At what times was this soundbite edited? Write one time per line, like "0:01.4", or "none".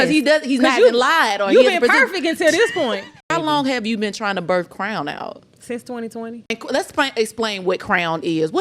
0:03.1
0:06.5